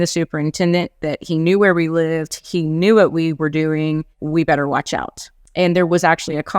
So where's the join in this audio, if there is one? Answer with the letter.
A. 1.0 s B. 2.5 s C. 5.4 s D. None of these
C